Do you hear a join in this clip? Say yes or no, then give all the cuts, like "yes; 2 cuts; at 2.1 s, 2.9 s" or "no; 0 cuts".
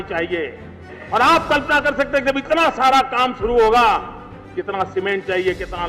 yes; 1 cut; at 1.0 s